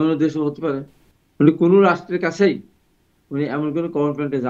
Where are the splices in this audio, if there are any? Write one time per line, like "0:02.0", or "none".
none